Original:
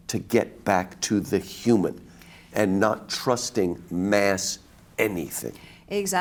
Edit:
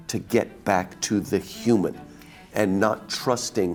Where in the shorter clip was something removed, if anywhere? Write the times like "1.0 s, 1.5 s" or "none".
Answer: none